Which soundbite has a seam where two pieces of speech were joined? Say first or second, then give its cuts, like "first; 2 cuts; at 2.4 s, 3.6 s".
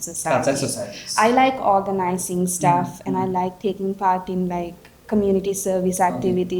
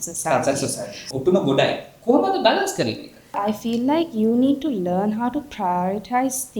second; 2 cuts; at 1.0 s, 3.4 s